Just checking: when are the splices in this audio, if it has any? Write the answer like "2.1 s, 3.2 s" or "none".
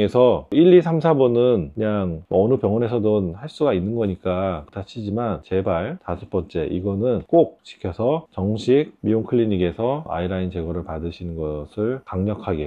none